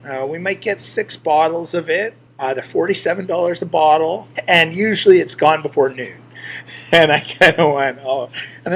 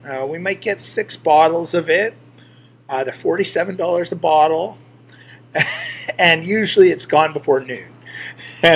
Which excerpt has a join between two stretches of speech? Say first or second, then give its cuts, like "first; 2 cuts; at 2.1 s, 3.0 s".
first; 2 cuts; at 2.2 s, 4.3 s